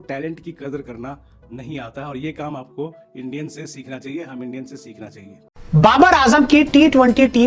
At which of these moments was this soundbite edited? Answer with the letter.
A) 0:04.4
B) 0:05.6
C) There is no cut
B